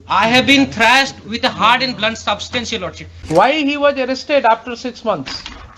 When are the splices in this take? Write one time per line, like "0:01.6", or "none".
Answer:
0:03.1